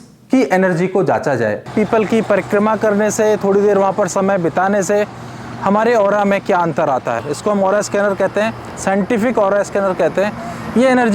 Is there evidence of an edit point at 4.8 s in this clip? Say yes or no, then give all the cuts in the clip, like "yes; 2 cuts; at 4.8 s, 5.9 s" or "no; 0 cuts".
no; 2 cuts; at 1.7 s, 7.2 s